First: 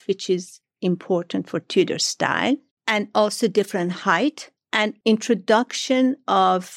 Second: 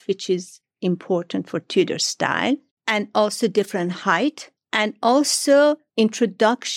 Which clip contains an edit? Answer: first; 1 cut; at 4.9 s

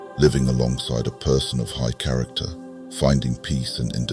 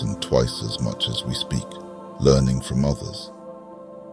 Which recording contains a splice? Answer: second; 1 cut; at 3.0 s

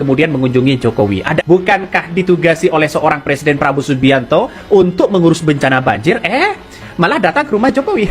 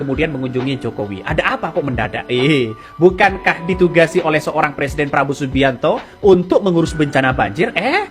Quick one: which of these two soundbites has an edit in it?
first; 1 cut; at 1.4 s

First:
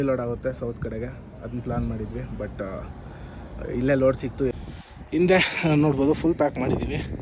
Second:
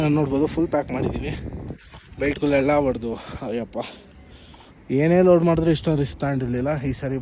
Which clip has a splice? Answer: first; 1 cut; at 4.5 s

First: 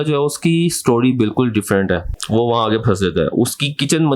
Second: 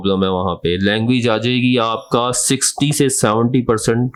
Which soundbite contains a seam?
first; 1 cut; at 2.1 s

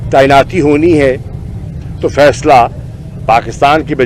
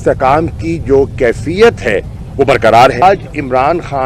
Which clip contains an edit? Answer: second; 1 cut; at 3.0 s

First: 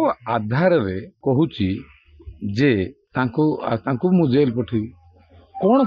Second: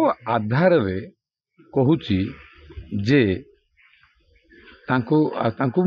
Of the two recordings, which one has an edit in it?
first; 2 cuts; at 1.1 s, 3.0 s

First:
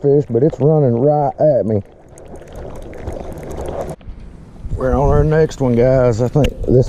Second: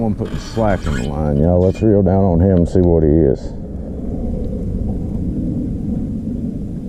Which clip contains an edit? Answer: first; 1 cut; at 4.0 s

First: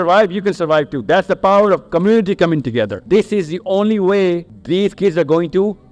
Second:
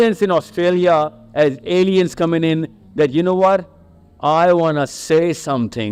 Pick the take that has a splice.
first; 2 cuts; at 3.0 s, 4.5 s

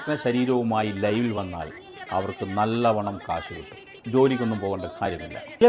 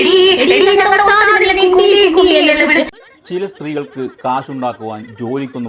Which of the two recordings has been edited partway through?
second; 1 cut; at 2.9 s

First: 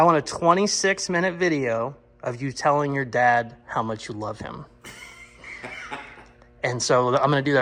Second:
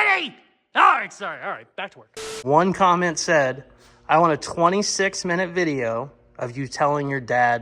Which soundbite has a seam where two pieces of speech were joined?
second; 1 cut; at 2.3 s

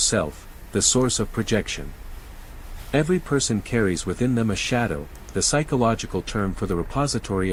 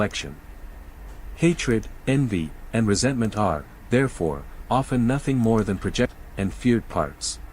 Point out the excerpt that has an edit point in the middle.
second; 1 cut; at 6.1 s

